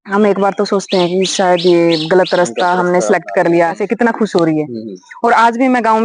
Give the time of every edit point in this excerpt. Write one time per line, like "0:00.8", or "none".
0:03.8